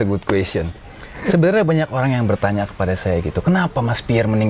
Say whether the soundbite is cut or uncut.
uncut